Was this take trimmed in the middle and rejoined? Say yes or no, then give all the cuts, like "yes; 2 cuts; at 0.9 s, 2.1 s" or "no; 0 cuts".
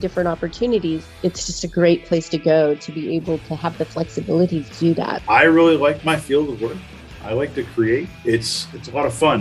yes; 3 cuts; at 1.1 s, 5.2 s, 8.1 s